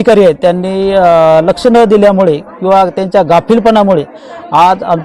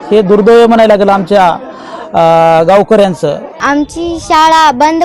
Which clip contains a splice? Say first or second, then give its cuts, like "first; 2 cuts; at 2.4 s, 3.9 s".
second; 1 cut; at 3.6 s